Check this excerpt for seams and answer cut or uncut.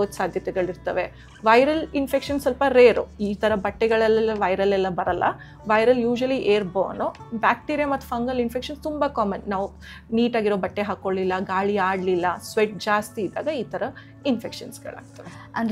uncut